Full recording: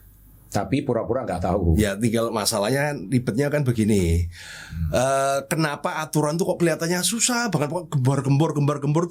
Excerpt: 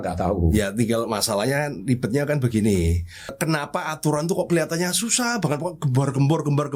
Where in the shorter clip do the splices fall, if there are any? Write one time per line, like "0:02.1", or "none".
0:03.4